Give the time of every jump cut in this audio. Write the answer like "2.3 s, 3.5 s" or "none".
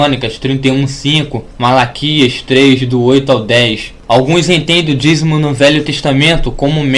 5.3 s